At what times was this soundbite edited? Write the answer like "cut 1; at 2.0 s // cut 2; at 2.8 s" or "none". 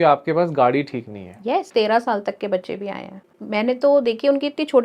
cut 1; at 1.7 s // cut 2; at 3.4 s